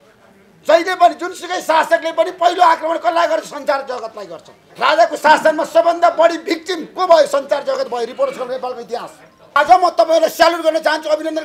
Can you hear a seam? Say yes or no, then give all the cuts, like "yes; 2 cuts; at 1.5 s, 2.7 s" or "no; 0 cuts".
yes; 2 cuts; at 4.6 s, 9.6 s